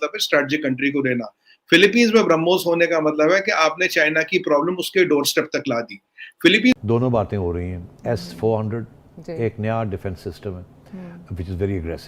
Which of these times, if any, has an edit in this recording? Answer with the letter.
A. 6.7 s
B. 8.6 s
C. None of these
A